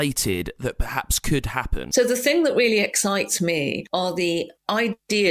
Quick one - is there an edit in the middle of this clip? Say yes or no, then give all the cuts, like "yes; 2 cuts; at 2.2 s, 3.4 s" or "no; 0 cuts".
yes; 1 cut; at 1.7 s